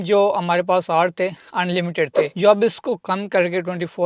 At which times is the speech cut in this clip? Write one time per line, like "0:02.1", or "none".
none